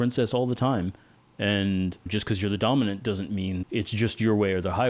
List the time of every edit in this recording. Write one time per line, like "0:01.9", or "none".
0:03.6